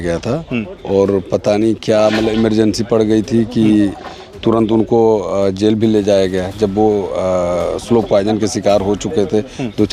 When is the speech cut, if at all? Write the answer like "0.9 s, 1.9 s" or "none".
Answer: none